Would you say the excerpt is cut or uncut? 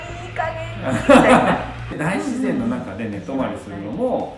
cut